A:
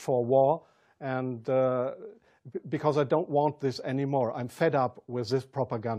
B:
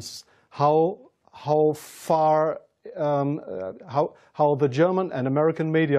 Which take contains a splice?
B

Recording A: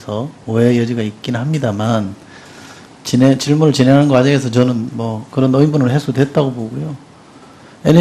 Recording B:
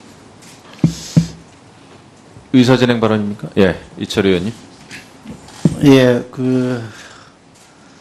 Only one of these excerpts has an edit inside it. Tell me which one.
A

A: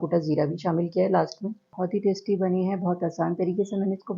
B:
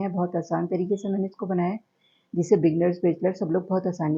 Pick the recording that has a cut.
A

